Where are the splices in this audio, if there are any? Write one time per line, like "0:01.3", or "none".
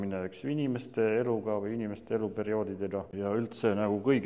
0:03.1